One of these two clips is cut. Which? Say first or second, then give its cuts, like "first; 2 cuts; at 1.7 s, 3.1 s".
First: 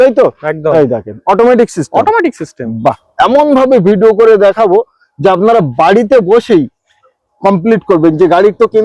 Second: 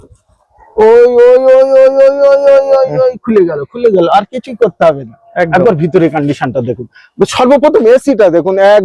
first; 1 cut; at 3.1 s